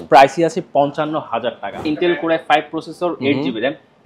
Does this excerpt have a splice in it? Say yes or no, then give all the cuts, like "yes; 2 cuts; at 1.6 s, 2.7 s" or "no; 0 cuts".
yes; 1 cut; at 1.8 s